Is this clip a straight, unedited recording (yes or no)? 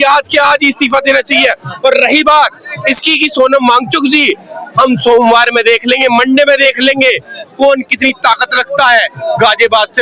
yes